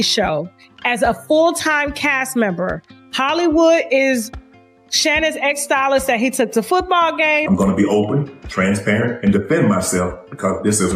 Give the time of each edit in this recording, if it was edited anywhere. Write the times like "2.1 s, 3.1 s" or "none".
7.5 s